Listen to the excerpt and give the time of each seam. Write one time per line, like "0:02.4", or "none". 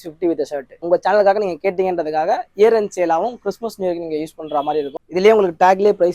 0:00.9
0:04.9

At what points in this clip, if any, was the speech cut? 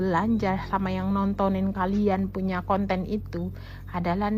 none

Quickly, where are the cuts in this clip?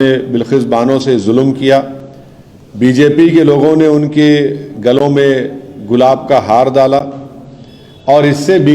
none

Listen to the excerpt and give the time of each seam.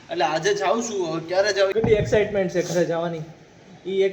0:01.7

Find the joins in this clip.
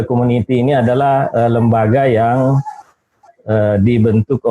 none

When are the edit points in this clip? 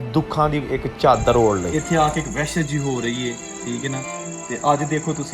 0:01.7

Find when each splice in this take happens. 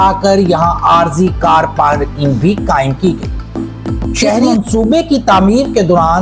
0:04.4

